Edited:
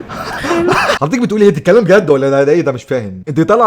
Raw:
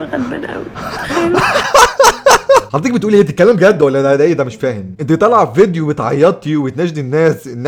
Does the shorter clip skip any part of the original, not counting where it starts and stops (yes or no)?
yes